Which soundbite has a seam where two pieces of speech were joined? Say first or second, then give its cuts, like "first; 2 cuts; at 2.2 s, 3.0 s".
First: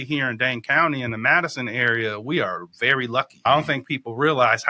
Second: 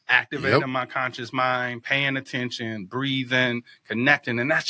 first; 1 cut; at 3.3 s